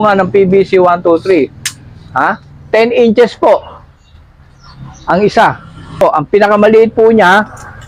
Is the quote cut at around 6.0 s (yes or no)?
yes